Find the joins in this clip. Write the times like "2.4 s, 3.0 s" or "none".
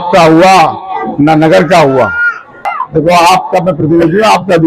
2.8 s